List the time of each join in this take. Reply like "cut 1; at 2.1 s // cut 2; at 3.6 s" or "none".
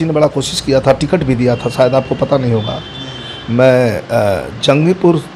none